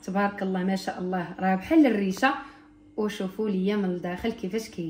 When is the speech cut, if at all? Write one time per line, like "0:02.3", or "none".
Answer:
none